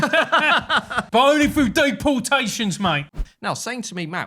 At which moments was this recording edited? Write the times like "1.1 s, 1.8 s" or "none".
3.2 s

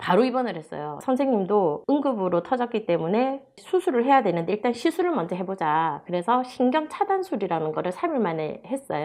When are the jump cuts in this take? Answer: none

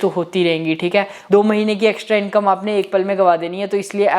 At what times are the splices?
1.2 s

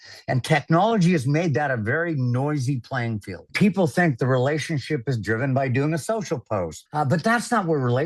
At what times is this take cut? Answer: 3.5 s, 6.8 s

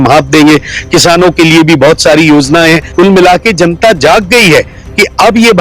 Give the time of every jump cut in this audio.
2.9 s

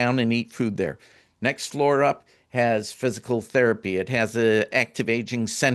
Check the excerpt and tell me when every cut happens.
4.7 s

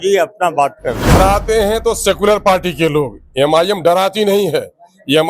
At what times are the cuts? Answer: 1.2 s

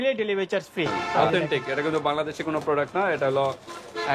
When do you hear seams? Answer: 1.0 s

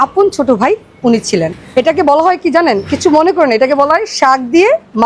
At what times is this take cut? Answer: 1.6 s

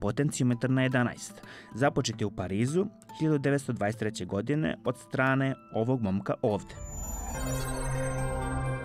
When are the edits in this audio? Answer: 7.3 s

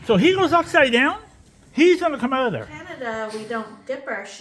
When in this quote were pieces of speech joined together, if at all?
2.8 s

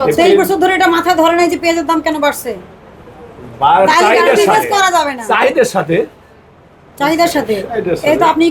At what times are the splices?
none

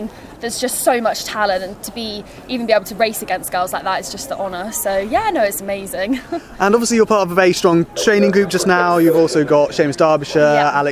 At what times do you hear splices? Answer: none

